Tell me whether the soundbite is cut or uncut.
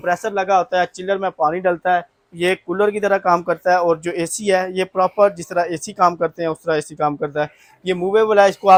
uncut